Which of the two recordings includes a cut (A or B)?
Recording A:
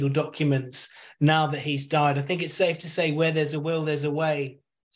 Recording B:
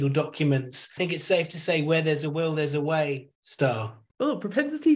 B